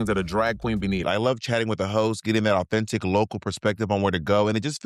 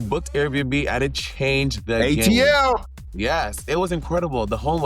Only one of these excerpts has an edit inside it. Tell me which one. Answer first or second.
first